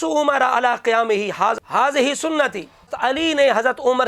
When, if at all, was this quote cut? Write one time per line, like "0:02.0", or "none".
0:02.9